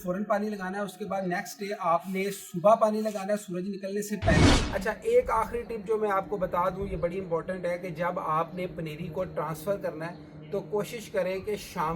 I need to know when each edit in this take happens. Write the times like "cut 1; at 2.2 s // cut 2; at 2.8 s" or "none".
cut 1; at 4.6 s